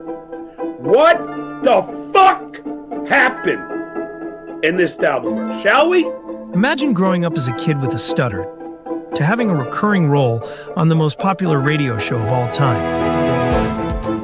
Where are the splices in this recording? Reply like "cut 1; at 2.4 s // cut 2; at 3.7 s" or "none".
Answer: cut 1; at 6.2 s